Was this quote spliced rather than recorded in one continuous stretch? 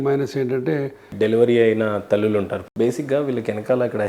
yes; 2 cuts; at 1.0 s, 2.6 s

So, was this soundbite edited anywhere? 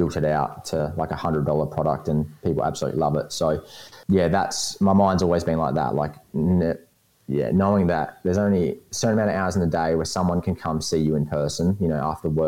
yes; 1 cut; at 3.9 s

